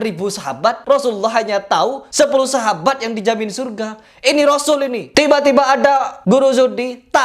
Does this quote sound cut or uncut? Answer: cut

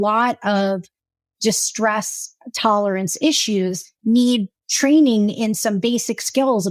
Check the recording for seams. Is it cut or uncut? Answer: uncut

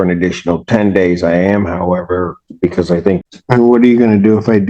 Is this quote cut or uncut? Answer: cut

